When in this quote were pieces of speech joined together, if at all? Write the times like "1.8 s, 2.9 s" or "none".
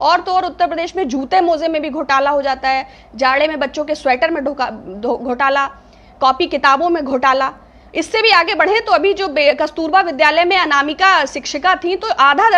none